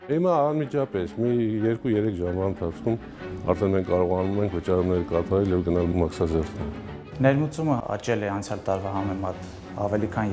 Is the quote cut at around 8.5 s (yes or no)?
no